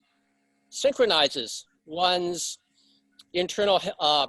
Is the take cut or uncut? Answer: uncut